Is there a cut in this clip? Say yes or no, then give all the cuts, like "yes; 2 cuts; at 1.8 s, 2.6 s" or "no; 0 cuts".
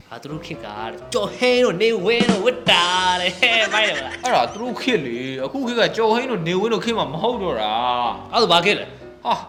no; 0 cuts